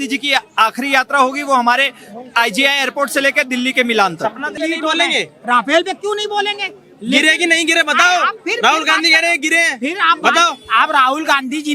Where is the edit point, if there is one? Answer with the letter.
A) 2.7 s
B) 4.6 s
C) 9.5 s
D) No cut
B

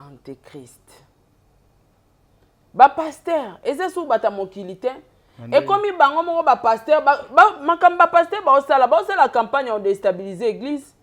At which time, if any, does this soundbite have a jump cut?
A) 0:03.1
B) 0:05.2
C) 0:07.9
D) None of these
D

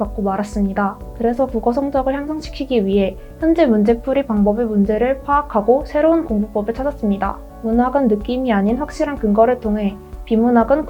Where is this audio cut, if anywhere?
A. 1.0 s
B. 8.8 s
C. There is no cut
A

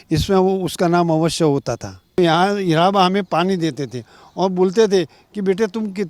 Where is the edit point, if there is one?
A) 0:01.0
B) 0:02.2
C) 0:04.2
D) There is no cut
B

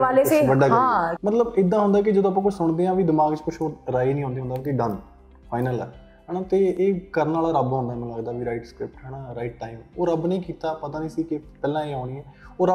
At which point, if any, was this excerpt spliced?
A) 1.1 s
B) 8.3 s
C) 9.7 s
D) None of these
A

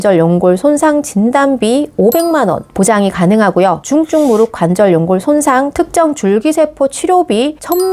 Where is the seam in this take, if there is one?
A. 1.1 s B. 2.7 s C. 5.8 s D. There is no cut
D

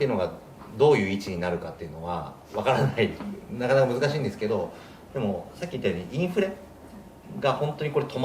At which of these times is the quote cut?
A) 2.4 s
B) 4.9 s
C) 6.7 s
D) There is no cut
A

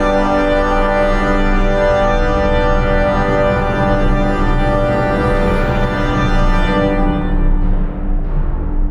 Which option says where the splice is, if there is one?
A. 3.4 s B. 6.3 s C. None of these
C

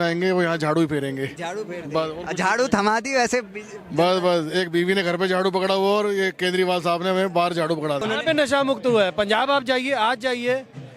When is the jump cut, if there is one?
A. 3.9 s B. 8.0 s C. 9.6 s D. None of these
B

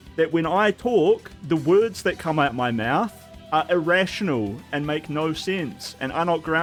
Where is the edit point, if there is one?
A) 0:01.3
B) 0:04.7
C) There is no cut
C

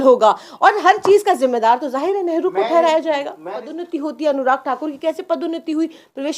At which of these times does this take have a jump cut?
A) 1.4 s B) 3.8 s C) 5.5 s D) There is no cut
B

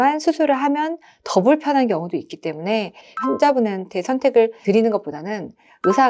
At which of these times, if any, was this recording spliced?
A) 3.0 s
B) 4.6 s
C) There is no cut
A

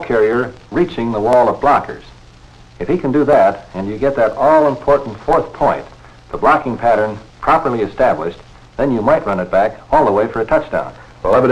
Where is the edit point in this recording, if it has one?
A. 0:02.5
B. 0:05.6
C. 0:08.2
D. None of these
C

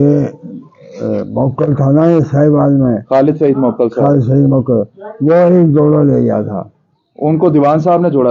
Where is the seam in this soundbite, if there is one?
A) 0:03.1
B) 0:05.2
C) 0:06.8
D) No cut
D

